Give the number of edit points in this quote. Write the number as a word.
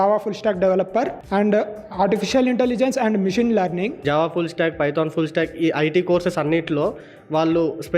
two